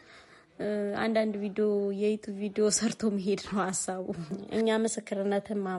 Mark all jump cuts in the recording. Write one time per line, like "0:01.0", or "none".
0:04.4